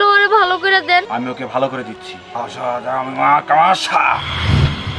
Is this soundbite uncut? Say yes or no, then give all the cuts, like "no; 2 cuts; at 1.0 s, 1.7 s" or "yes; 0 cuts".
no; 2 cuts; at 1.1 s, 2.3 s